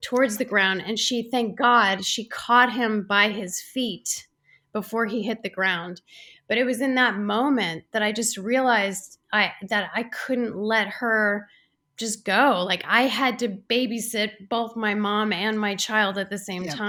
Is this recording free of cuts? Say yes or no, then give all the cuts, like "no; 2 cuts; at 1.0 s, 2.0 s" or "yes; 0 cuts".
yes; 0 cuts